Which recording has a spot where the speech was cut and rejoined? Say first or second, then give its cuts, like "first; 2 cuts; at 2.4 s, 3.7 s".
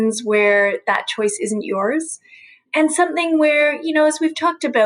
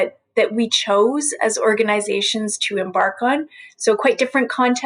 first; 1 cut; at 2.7 s